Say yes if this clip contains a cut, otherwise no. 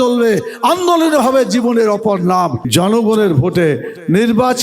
yes